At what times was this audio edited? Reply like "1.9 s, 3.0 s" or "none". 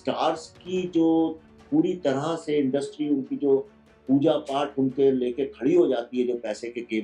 none